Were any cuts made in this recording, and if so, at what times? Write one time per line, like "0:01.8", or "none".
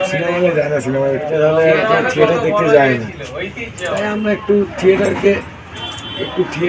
0:01.3